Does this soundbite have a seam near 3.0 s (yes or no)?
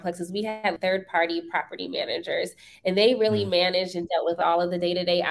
no